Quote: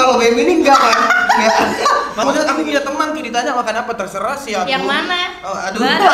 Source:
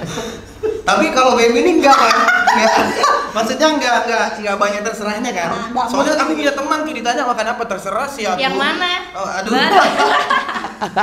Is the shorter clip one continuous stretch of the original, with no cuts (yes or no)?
no